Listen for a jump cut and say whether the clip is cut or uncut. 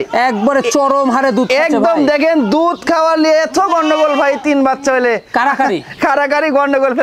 uncut